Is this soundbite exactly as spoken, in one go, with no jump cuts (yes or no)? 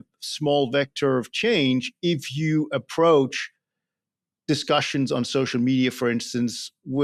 yes